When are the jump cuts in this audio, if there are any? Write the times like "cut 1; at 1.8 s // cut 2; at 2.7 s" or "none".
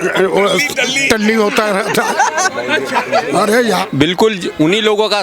cut 1; at 3.9 s